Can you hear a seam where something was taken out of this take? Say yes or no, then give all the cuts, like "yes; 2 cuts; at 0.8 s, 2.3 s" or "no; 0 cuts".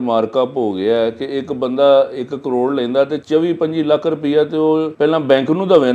yes; 2 cuts; at 3.2 s, 4.9 s